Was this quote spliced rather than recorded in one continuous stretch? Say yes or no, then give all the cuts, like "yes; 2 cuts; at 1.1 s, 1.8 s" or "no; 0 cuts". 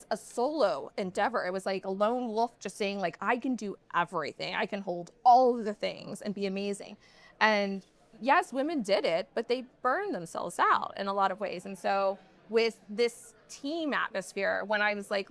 no; 0 cuts